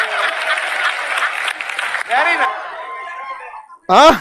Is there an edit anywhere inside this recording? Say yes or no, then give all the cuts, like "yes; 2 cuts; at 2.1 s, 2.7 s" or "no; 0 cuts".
yes; 1 cut; at 2.3 s